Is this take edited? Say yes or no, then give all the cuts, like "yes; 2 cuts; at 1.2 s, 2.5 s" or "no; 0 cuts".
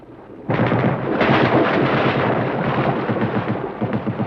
no; 0 cuts